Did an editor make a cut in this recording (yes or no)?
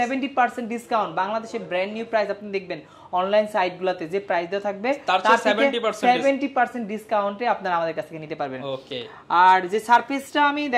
no